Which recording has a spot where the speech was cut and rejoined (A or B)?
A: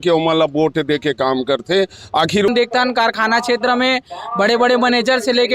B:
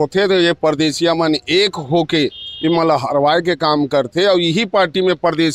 A